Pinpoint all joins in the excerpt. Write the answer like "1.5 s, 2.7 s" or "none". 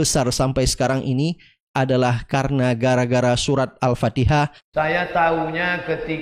4.6 s